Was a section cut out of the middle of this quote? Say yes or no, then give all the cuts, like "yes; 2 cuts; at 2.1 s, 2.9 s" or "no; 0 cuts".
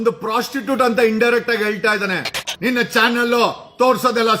yes; 1 cut; at 2.4 s